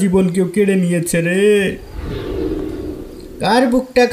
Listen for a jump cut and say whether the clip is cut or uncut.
cut